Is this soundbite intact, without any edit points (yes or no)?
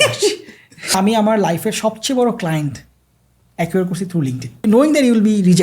no